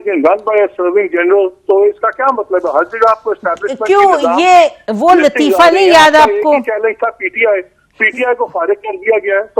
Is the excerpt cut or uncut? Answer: uncut